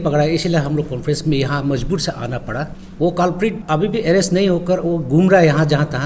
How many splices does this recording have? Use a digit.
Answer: 2